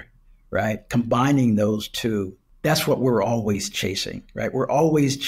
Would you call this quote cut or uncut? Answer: cut